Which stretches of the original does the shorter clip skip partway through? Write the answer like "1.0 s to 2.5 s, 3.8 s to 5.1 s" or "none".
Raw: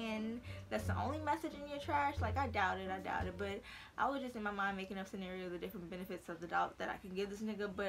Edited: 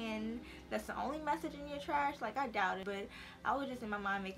2.8 s to 3.3 s